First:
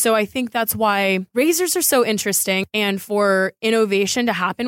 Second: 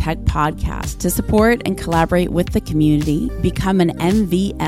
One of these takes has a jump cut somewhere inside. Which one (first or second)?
first